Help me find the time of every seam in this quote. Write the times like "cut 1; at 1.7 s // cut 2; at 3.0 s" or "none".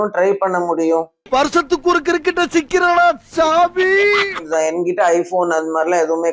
cut 1; at 4.4 s